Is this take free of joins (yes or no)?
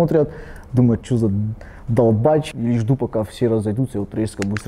no